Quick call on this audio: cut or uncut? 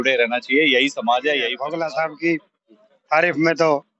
cut